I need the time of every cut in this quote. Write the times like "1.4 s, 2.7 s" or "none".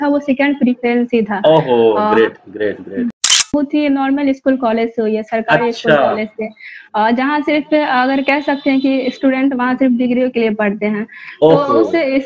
3.5 s